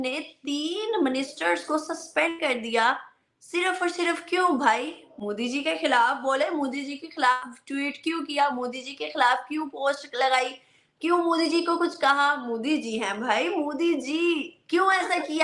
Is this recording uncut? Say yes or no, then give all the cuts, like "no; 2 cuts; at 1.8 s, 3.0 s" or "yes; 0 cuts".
yes; 0 cuts